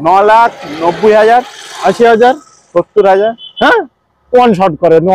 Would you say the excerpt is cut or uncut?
uncut